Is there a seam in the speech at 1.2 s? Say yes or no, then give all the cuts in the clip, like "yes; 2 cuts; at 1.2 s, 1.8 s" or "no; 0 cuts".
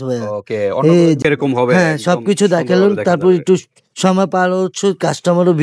yes; 1 cut; at 1.2 s